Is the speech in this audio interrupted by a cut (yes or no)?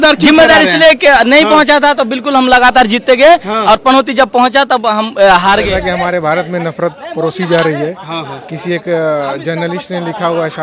yes